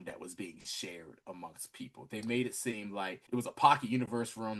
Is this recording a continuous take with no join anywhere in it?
no; 1 cut; at 3.2 s

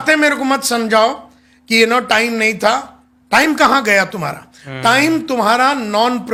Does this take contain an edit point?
no; 0 cuts

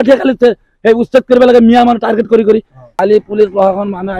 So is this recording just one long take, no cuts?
no; 1 cut; at 2.9 s

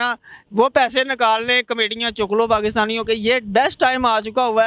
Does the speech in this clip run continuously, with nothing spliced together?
yes; 0 cuts

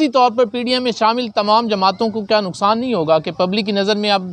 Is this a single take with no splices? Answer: yes; 0 cuts

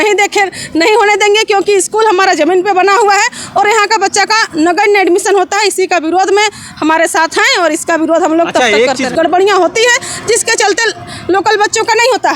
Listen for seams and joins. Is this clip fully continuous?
no; 1 cut; at 9.1 s

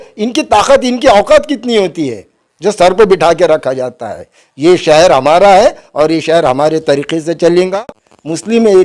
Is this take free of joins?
no; 1 cut; at 7.7 s

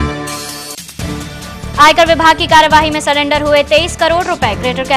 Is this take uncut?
no; 1 cut; at 1.2 s

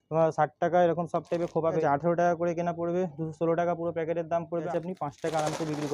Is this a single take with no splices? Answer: no; 2 cuts; at 1.8 s, 4.7 s

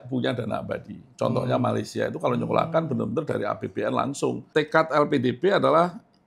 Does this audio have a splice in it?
yes; 1 cut; at 4.4 s

